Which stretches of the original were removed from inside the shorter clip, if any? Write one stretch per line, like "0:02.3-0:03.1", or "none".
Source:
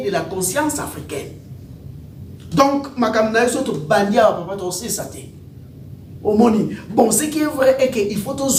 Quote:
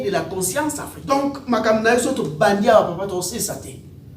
0:01.1-0:02.6